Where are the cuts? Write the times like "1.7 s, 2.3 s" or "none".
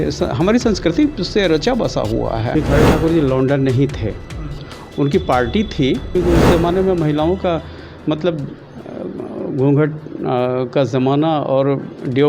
2.5 s, 6.1 s